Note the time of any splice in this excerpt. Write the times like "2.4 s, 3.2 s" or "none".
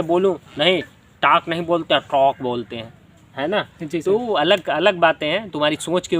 none